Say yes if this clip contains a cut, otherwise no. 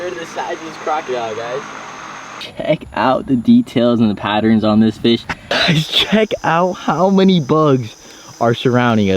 yes